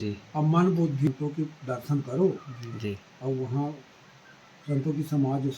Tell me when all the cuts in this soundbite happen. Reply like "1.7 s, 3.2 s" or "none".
1.1 s